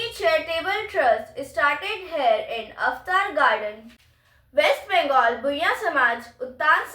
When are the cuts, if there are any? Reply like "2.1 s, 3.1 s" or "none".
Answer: 3.9 s